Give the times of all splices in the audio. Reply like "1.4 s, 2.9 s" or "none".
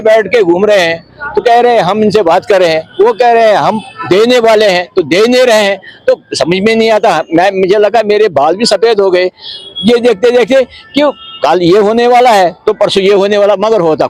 none